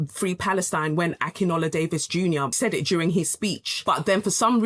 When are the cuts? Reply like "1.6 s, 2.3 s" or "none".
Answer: 2.5 s, 3.7 s